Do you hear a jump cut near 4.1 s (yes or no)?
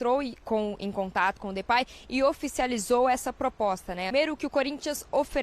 yes